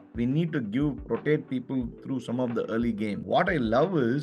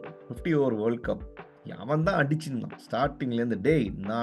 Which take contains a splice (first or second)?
first